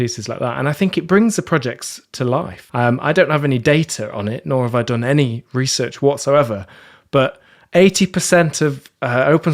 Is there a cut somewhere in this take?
yes; 1 cut; at 2.6 s

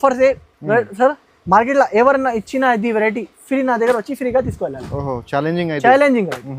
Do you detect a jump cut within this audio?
no; 0 cuts

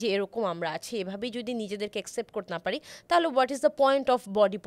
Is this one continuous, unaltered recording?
yes; 0 cuts

